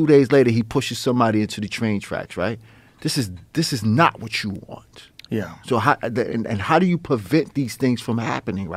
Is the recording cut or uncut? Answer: uncut